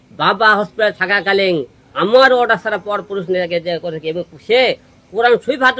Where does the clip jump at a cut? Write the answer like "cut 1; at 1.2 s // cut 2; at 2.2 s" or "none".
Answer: none